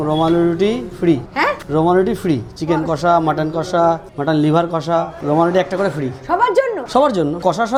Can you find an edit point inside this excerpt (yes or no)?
no